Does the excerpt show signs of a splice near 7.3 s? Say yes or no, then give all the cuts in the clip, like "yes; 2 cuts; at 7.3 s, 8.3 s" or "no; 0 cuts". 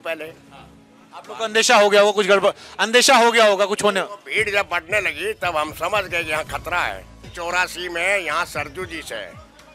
yes; 1 cut; at 7.3 s